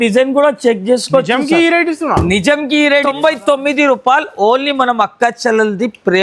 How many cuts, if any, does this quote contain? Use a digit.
1